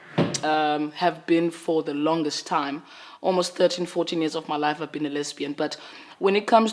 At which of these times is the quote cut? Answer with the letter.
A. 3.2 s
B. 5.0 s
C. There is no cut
A